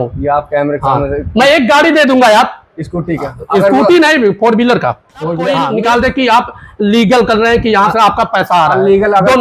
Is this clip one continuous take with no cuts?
yes; 0 cuts

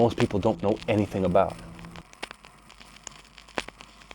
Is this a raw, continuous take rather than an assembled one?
no; 1 cut; at 1.9 s

